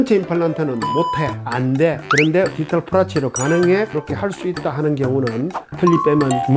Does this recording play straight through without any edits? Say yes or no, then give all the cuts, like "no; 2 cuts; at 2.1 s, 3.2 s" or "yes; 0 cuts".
no; 2 cuts; at 3.9 s, 5.6 s